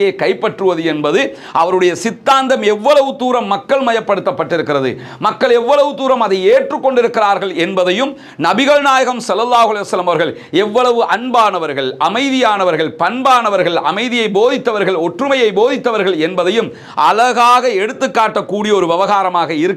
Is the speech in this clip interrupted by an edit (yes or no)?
no